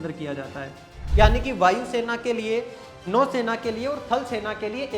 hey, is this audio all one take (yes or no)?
no